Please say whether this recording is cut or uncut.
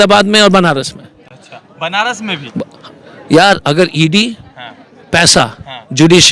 uncut